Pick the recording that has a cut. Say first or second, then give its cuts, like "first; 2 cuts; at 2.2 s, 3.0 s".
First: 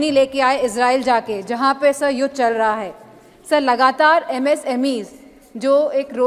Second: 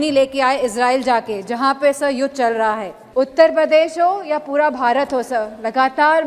second; 1 cut; at 2.9 s